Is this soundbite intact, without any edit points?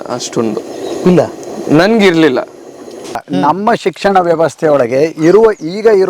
no; 1 cut; at 3.2 s

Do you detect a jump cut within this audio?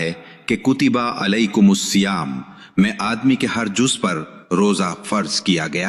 no; 0 cuts

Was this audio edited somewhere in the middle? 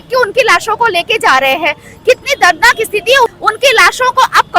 yes; 1 cut; at 3.3 s

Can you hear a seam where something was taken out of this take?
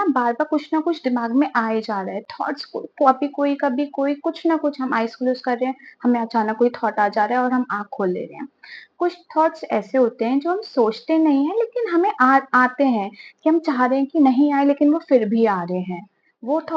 no; 0 cuts

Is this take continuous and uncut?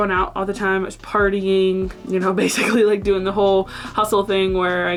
yes; 0 cuts

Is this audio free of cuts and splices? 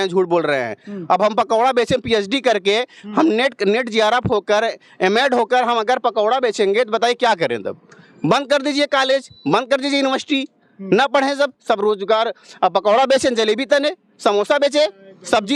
yes; 0 cuts

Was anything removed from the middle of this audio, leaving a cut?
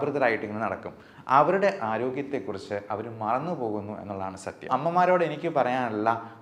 yes; 1 cut; at 4.7 s

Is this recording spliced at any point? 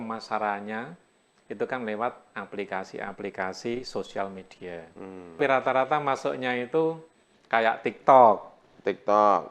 yes; 1 cut; at 5.4 s

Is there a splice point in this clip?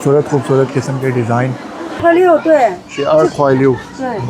yes; 1 cut; at 2.0 s

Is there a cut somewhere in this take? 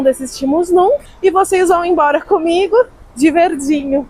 yes; 2 cuts; at 1.1 s, 3.0 s

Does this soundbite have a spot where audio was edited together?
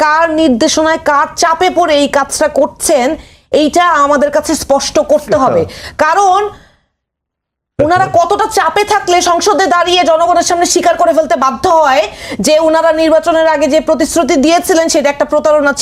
no; 0 cuts

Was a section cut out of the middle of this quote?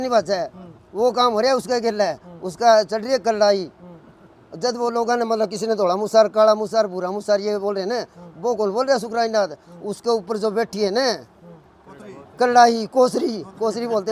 no; 0 cuts

